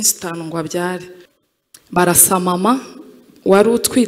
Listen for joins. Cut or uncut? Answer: cut